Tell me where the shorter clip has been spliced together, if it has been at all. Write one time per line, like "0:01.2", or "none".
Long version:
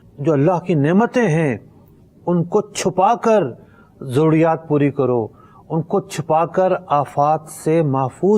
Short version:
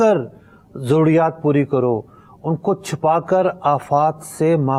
none

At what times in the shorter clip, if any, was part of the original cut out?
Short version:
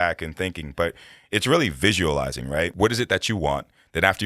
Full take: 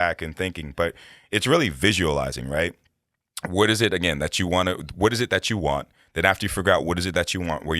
0:02.7

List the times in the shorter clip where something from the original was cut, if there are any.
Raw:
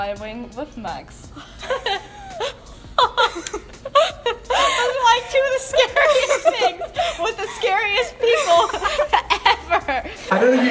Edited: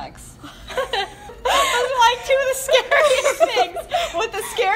0:01.4

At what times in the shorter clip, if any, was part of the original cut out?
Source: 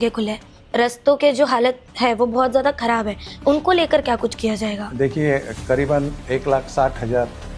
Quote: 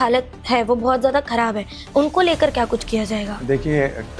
none

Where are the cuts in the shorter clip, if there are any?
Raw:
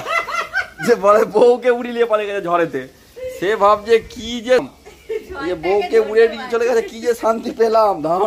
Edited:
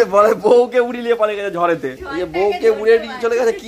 0:02.0

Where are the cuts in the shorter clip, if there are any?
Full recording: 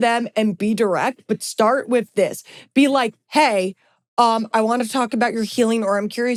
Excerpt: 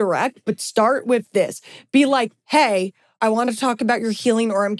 0:03.1

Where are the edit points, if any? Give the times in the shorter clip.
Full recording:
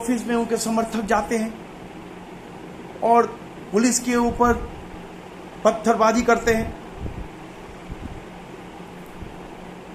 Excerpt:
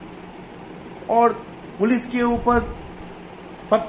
none

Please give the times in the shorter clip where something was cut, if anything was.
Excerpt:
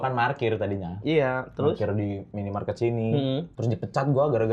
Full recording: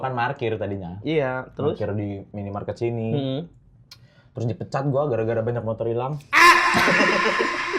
0:03.5

